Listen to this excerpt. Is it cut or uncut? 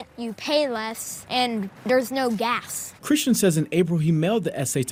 uncut